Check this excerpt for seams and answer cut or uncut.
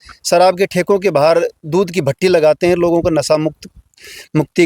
uncut